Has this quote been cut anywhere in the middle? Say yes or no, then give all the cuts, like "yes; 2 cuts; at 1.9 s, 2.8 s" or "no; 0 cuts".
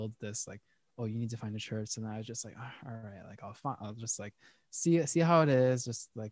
no; 0 cuts